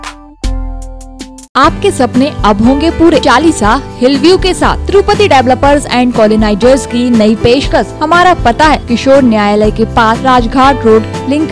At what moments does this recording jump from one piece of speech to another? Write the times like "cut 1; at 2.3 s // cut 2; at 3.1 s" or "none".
cut 1; at 1.5 s // cut 2; at 3.2 s // cut 3; at 7.9 s // cut 4; at 8.8 s // cut 5; at 10.2 s